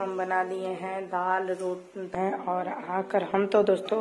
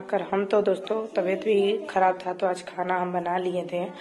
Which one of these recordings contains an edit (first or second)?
first